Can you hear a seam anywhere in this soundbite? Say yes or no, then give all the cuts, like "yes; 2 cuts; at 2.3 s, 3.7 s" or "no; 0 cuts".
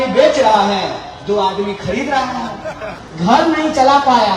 yes; 1 cut; at 2.9 s